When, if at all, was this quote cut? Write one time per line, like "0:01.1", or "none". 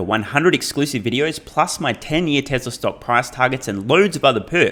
none